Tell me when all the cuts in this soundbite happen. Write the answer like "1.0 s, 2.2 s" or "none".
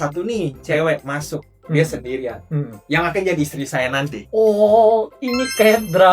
none